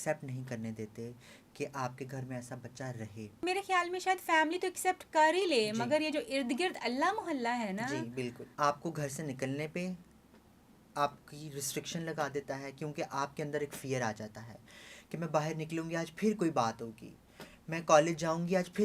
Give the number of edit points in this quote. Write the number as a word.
two